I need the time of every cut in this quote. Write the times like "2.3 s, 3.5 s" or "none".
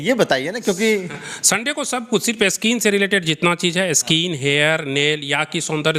none